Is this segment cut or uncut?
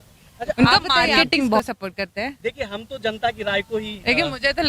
cut